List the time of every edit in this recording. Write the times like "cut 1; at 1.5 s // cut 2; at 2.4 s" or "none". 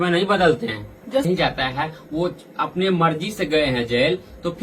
cut 1; at 1.2 s